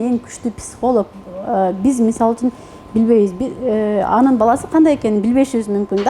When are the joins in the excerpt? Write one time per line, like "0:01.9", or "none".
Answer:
none